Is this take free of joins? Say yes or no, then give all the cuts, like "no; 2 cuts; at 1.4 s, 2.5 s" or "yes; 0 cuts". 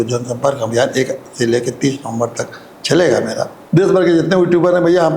no; 1 cut; at 3.5 s